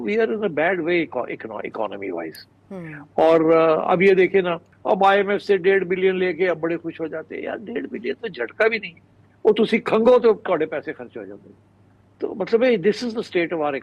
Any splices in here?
no; 0 cuts

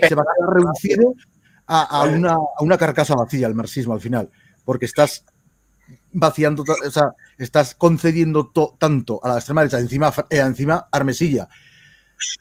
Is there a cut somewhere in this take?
no; 0 cuts

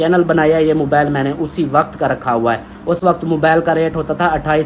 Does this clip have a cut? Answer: no; 0 cuts

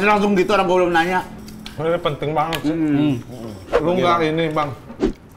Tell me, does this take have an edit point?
no; 0 cuts

